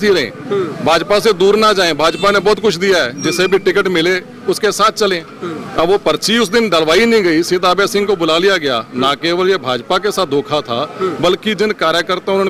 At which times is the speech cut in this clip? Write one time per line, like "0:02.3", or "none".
none

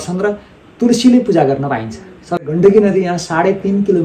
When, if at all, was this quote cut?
0:02.4

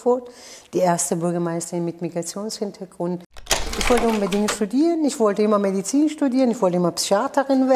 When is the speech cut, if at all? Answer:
0:03.7

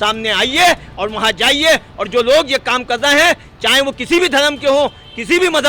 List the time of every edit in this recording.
none

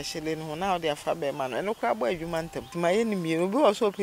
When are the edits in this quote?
0:02.6

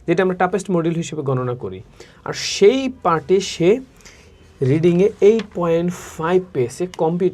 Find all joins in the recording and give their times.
none

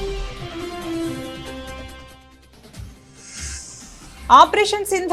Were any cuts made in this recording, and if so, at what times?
none

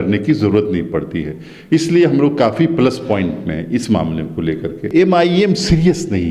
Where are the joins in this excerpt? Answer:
0:04.9

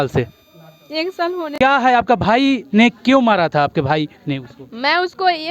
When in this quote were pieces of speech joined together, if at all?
0:01.6

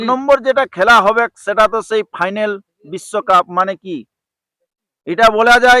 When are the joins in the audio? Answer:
none

